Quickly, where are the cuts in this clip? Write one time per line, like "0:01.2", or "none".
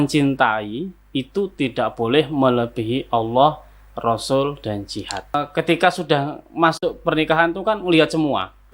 0:05.3